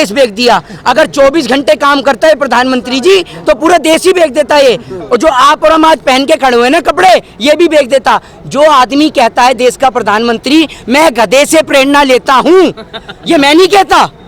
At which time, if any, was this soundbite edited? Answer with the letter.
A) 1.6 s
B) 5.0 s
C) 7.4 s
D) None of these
D